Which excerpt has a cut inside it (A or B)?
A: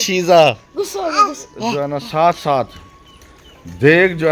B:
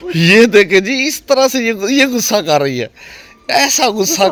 A